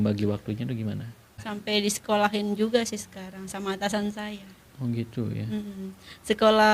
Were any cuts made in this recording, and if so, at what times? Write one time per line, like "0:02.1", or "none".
0:01.4